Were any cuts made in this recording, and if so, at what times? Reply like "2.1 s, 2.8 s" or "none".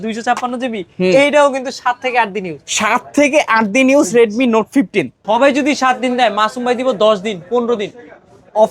5.2 s